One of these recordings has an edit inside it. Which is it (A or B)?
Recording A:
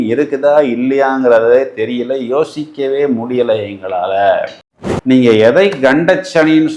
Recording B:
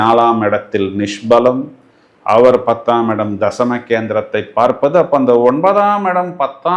A